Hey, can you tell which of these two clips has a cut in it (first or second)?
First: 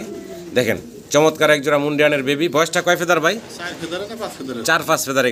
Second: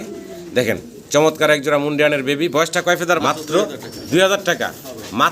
second